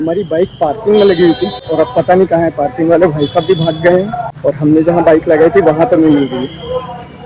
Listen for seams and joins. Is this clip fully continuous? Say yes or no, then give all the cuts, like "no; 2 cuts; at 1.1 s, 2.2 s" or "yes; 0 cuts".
no; 2 cuts; at 1.6 s, 4.2 s